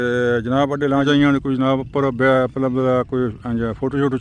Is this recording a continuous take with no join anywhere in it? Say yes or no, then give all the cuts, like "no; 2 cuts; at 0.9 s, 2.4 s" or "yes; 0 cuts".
no; 1 cut; at 1.1 s